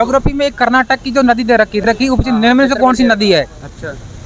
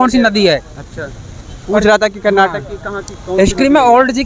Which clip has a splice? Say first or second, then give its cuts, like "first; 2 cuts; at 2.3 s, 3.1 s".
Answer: first; 1 cut; at 1.8 s